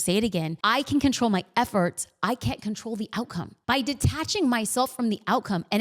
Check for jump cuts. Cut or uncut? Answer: cut